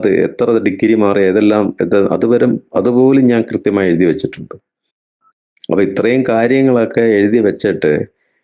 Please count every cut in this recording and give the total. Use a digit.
0